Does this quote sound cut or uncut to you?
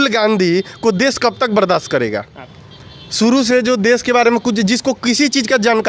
uncut